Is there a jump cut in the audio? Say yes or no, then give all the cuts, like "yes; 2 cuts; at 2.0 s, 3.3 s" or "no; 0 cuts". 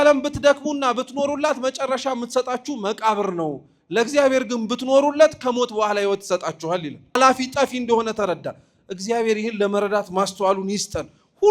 no; 0 cuts